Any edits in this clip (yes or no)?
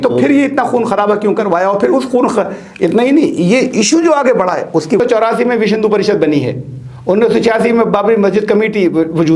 yes